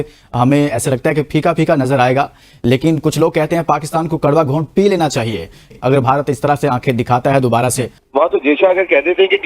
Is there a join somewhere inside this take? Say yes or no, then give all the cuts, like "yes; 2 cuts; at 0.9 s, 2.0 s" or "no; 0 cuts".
yes; 2 cuts; at 5.7 s, 7.9 s